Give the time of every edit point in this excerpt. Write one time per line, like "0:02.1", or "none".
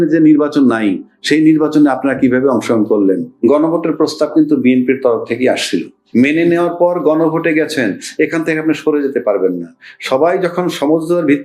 0:03.3
0:06.0